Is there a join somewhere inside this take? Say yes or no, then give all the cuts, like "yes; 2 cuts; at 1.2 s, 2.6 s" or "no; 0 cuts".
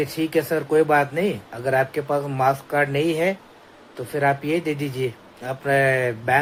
no; 0 cuts